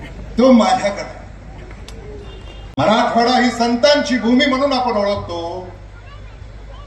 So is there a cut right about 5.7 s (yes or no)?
no